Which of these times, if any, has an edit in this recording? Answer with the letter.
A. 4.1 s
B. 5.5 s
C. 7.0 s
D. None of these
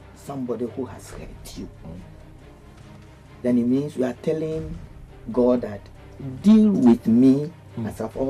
D